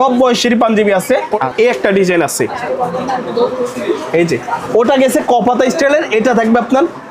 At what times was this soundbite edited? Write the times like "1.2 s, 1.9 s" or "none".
1.4 s